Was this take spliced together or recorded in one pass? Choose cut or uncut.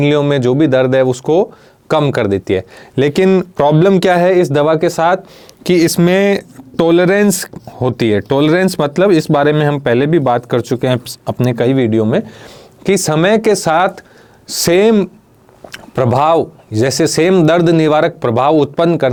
uncut